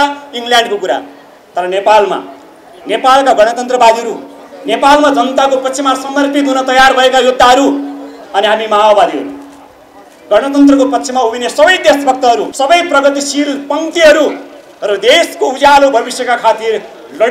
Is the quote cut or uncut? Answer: cut